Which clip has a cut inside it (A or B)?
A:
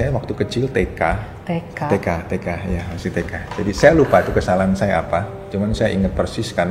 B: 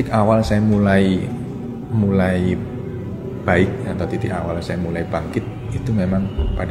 A